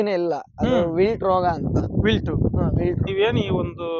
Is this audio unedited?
no; 1 cut; at 3.0 s

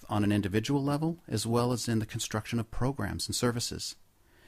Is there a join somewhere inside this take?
no; 0 cuts

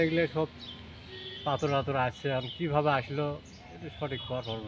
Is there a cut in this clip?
no; 0 cuts

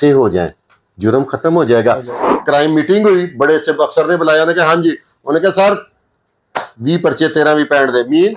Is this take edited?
yes; 1 cut; at 2.2 s

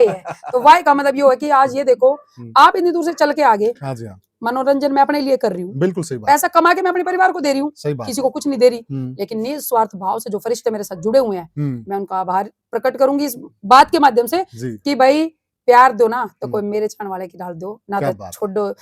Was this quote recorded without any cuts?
yes; 0 cuts

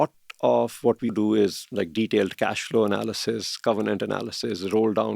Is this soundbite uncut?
no; 1 cut; at 1.1 s

